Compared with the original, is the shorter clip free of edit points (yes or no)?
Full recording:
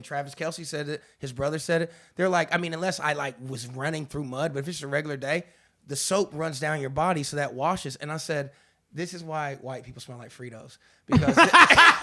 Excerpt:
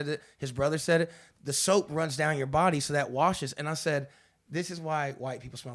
no